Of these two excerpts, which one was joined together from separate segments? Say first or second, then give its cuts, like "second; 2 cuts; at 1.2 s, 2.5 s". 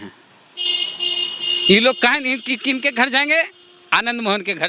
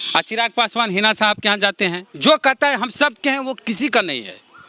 second; 1 cut; at 2.1 s